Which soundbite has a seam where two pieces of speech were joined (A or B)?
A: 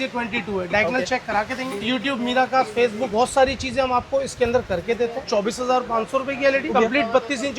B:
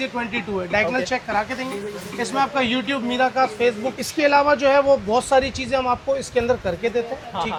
A